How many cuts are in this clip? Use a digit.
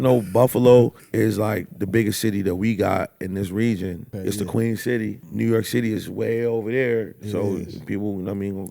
3